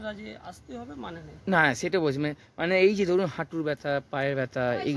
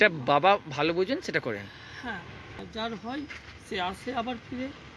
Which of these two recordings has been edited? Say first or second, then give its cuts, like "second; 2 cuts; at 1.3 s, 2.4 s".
second; 1 cut; at 2.6 s